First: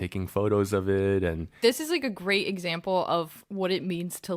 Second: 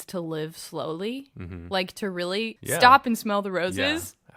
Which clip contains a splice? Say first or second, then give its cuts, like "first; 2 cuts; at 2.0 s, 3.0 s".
first; 1 cut; at 1.6 s